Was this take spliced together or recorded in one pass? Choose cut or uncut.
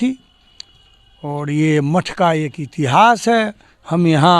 uncut